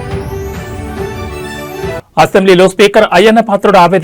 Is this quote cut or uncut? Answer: cut